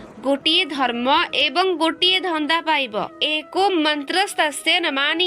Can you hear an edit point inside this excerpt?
yes; 1 cut; at 3.2 s

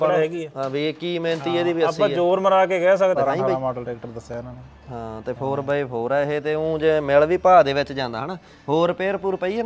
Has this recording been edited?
yes; 1 cut; at 3.2 s

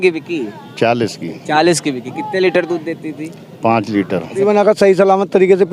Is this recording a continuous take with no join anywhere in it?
no; 1 cut; at 4.4 s

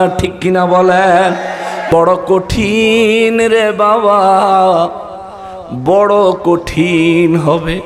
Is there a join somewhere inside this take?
yes; 1 cut; at 1.8 s

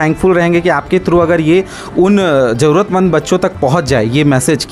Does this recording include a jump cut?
no; 0 cuts

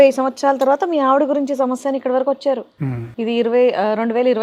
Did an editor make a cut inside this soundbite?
no; 0 cuts

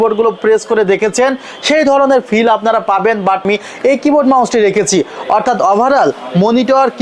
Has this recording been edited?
yes; 1 cut; at 3.4 s

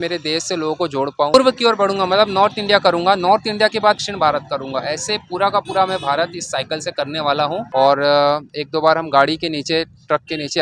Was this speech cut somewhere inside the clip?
yes; 2 cuts; at 1.3 s, 7.7 s

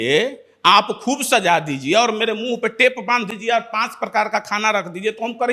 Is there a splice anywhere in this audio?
no; 0 cuts

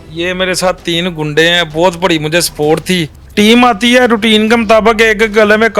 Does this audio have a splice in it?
yes; 1 cut; at 3.2 s

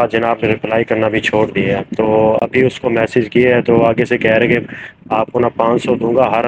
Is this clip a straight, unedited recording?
yes; 0 cuts

